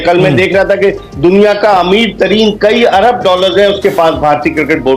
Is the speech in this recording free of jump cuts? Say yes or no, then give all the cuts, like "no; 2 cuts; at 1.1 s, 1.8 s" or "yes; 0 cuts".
yes; 0 cuts